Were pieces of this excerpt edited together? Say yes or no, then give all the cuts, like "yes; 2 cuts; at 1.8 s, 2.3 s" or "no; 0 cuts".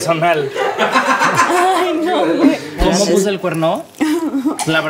yes; 1 cut; at 2.8 s